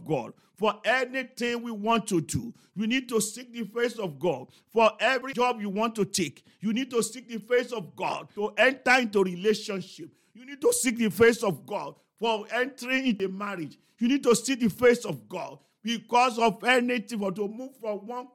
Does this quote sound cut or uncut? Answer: cut